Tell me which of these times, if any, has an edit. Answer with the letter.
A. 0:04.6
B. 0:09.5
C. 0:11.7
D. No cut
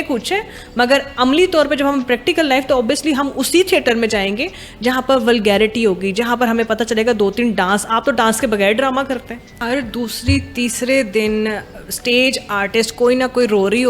B